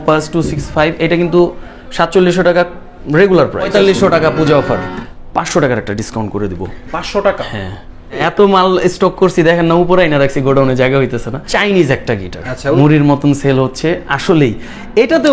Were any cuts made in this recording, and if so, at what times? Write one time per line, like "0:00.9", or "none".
0:03.7
0:04.9
0:08.0
0:11.4
0:12.8